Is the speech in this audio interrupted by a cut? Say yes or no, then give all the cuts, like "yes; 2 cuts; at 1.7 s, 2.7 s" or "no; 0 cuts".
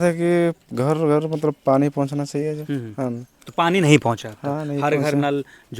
no; 0 cuts